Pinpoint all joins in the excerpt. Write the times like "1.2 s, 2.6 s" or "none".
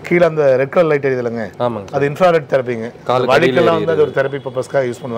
none

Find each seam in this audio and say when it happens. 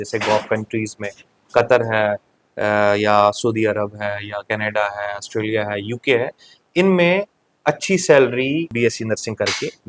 8.7 s

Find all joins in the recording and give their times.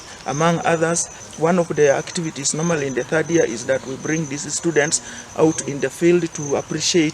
1.2 s

